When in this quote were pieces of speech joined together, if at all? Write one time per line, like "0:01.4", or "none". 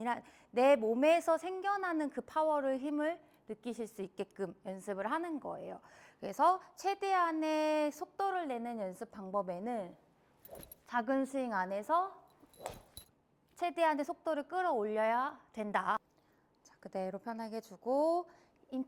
0:16.1